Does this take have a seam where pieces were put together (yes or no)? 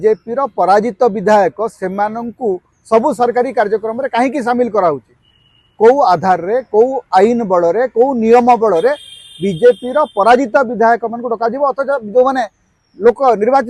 no